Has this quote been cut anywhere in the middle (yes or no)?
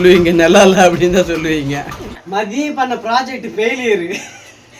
yes